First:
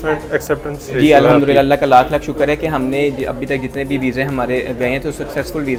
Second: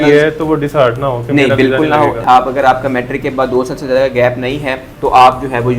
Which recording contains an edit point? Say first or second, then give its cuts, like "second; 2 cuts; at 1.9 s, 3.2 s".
second; 2 cuts; at 2.2 s, 4.9 s